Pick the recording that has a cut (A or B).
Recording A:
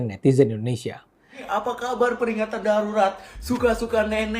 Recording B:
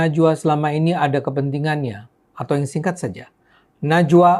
A